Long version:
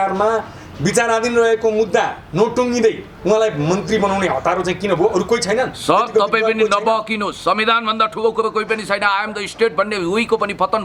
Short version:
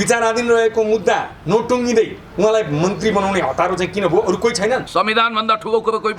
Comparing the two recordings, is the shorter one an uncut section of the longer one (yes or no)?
no